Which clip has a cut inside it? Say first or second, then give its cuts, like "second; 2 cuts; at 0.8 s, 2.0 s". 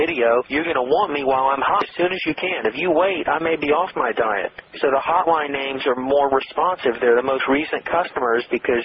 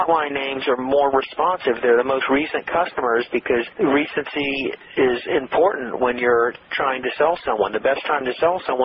first; 1 cut; at 1.9 s